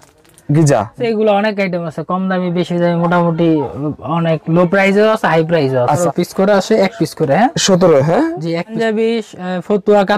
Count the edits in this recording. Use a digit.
3